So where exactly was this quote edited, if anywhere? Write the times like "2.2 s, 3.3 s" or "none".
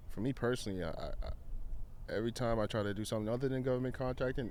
none